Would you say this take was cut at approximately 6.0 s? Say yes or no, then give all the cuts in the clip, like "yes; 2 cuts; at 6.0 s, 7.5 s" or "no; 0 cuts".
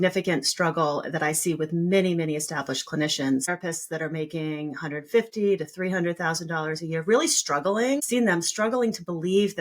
no; 2 cuts; at 3.5 s, 8.0 s